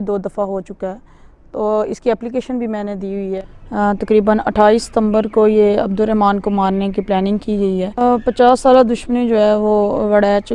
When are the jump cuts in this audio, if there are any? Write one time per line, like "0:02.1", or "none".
0:03.4
0:08.0